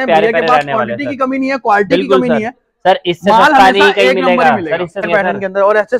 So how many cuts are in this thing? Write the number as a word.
one